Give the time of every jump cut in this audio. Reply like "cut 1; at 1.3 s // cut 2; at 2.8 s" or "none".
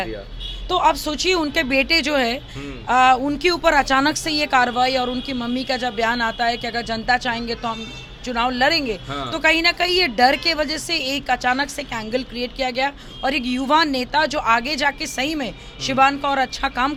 none